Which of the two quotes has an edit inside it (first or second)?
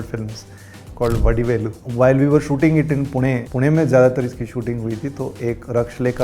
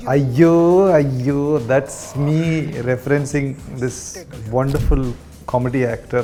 first